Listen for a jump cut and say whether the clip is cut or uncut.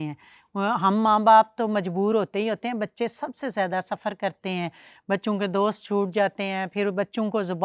uncut